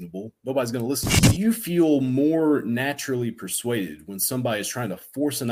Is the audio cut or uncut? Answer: cut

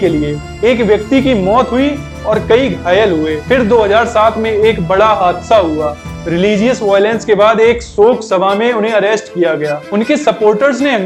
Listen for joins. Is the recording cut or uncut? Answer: uncut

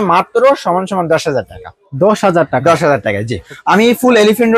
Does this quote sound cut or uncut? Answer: cut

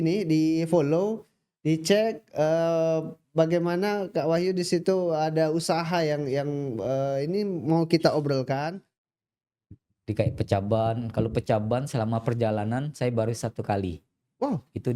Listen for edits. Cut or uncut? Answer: cut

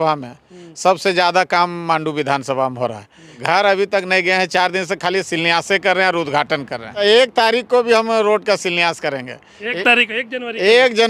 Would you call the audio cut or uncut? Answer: cut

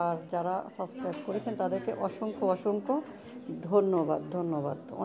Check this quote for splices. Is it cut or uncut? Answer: uncut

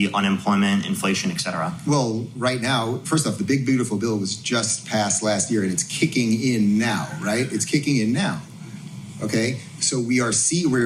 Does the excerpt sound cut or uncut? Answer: uncut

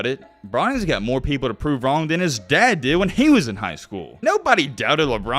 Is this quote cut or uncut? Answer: cut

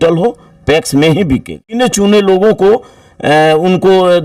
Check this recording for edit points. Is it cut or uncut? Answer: cut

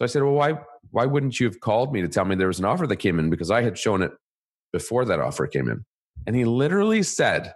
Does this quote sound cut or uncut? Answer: cut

